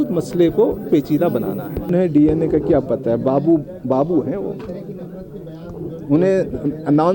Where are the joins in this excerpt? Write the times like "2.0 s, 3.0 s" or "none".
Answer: 1.9 s